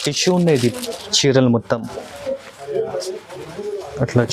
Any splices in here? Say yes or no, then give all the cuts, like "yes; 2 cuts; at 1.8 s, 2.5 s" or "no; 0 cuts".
no; 0 cuts